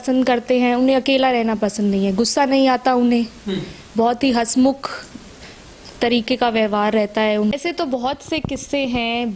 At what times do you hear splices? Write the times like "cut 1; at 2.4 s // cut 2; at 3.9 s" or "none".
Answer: cut 1; at 7.5 s